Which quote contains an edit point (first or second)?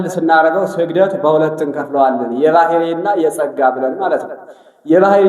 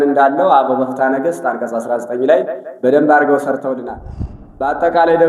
second